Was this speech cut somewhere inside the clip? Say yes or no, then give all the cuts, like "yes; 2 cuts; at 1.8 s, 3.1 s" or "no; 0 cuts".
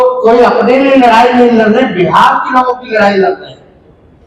no; 0 cuts